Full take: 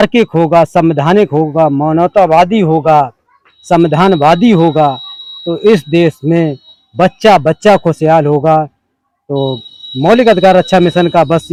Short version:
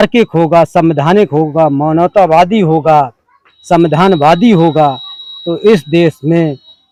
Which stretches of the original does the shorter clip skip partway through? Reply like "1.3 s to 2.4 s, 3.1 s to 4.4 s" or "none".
none